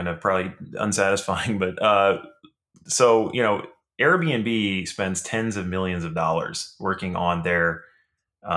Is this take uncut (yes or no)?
yes